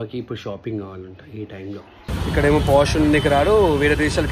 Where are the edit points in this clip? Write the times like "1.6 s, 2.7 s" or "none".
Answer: 2.1 s